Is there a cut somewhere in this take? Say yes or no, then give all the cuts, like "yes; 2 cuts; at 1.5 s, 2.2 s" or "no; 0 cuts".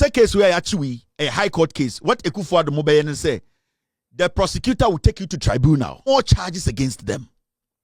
yes; 1 cut; at 6.1 s